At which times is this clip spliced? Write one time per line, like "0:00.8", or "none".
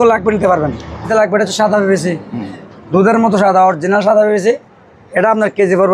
0:01.1